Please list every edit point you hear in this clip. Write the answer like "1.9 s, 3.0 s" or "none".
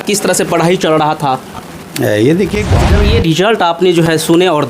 2.9 s